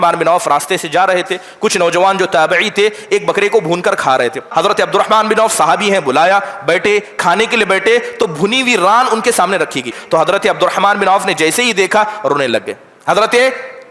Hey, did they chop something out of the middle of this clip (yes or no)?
yes